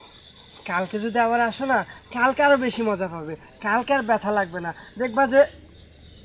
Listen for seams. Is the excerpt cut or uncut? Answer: uncut